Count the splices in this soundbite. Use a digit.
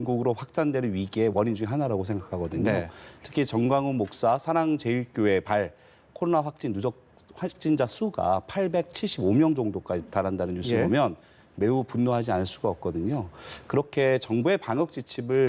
0